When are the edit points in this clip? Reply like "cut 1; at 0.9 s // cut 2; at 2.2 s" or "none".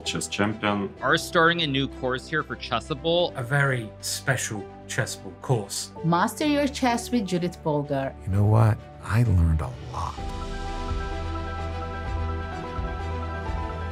none